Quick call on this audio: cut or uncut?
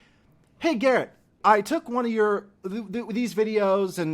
cut